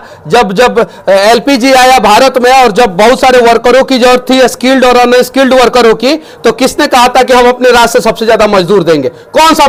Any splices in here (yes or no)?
no